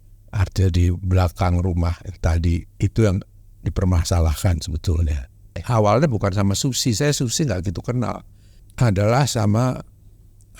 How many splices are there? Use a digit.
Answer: 1